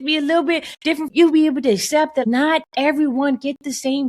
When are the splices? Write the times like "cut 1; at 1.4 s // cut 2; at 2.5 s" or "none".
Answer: cut 1; at 1.1 s // cut 2; at 2.2 s